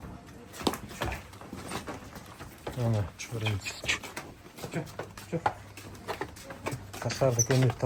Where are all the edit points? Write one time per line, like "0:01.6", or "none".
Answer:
none